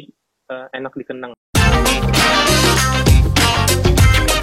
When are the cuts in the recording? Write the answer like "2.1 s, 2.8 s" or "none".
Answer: 1.4 s